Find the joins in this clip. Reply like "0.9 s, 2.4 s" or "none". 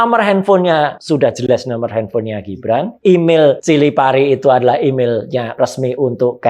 1.4 s, 2.9 s, 3.6 s, 5.6 s